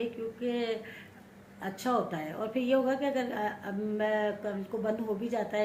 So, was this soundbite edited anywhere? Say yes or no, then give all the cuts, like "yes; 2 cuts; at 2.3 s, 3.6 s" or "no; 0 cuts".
no; 0 cuts